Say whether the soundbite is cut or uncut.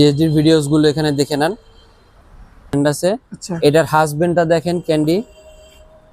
cut